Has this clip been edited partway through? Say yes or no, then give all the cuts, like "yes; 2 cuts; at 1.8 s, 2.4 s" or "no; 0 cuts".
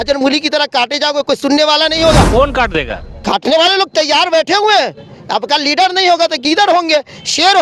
no; 0 cuts